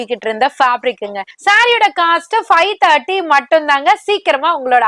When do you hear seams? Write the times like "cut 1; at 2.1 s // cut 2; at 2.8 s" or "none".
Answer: cut 1; at 1.3 s